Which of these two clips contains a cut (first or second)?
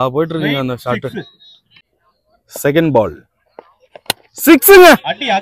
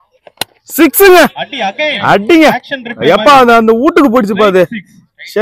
first